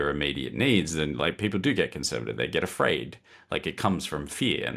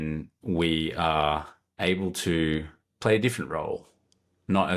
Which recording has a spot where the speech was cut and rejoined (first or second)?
second